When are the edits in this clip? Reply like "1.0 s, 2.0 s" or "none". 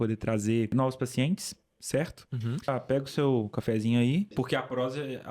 0.7 s, 2.7 s, 4.3 s